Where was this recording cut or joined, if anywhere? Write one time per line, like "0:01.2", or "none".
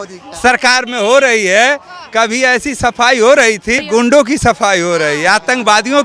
0:03.8